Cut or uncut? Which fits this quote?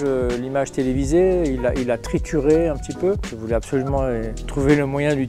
cut